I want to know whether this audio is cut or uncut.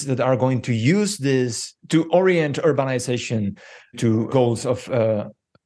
cut